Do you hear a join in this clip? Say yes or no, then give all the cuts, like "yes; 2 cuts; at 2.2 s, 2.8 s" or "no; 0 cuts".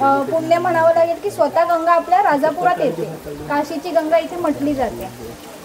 no; 0 cuts